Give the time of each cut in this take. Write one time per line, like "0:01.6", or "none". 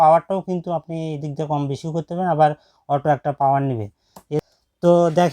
0:04.4